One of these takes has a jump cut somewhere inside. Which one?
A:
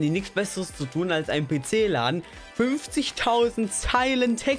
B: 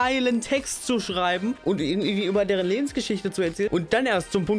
B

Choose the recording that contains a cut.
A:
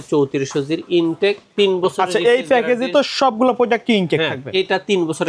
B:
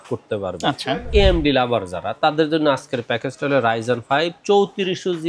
B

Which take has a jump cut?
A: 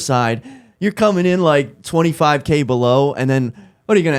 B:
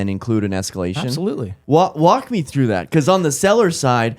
B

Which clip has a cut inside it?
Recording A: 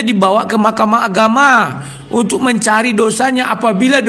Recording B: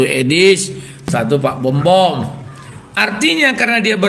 B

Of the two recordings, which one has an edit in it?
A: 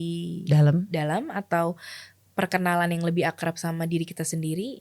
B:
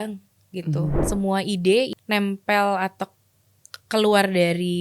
B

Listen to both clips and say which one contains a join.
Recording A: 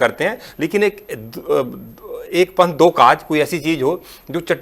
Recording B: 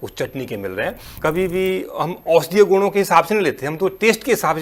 B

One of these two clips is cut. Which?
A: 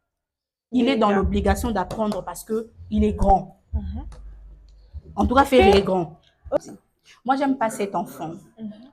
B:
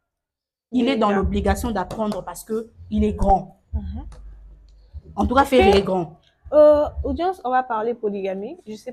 A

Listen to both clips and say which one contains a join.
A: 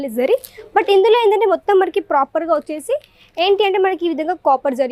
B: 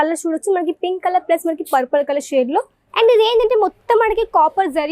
B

